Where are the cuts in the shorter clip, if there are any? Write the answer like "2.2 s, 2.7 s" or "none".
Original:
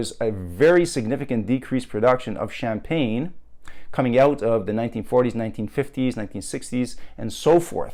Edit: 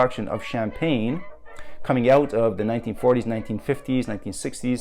none